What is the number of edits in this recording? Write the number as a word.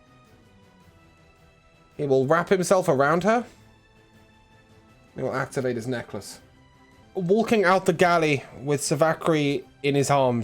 one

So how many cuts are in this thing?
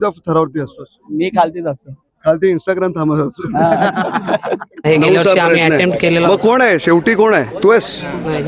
one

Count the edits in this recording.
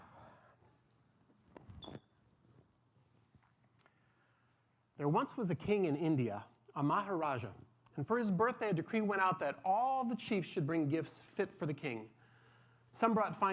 one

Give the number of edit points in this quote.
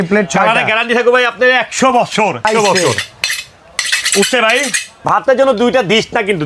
two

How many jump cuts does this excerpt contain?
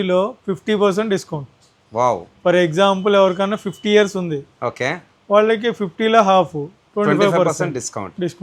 zero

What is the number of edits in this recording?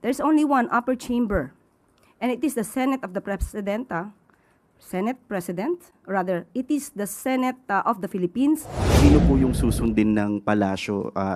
one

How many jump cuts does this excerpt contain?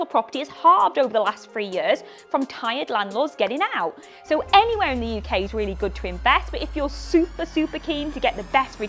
zero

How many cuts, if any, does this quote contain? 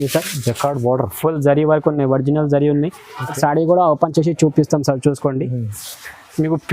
one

